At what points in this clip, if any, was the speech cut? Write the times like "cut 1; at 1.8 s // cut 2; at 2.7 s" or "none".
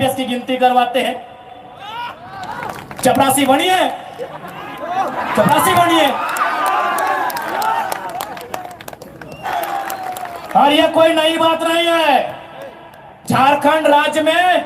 cut 1; at 9.5 s